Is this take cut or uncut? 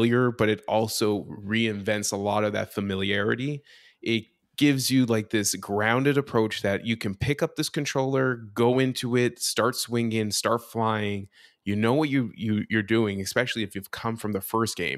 uncut